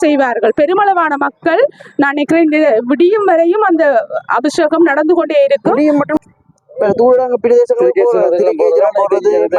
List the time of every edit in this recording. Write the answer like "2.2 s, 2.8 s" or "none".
6.2 s